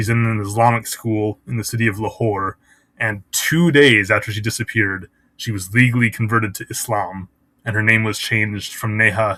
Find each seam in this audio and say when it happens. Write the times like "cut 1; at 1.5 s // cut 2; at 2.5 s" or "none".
none